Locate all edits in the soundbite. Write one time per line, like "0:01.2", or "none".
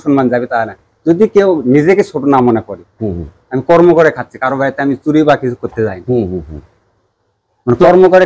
none